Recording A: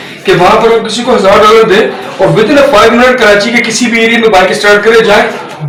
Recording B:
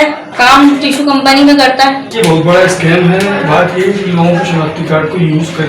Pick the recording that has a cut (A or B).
B